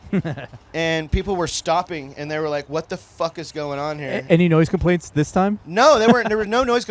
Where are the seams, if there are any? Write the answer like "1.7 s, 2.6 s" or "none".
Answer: none